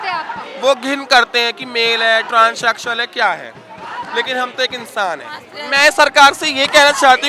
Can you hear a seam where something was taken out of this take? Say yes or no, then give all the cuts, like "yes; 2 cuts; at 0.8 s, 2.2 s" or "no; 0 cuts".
yes; 1 cut; at 5.5 s